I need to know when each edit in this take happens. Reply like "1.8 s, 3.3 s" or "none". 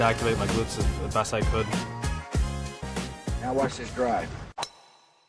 none